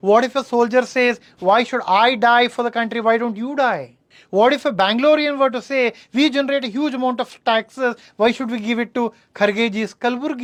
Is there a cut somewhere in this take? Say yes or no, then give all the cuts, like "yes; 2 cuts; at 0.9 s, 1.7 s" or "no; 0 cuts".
no; 0 cuts